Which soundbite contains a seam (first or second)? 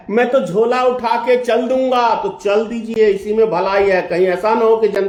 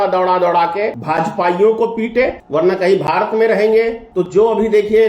second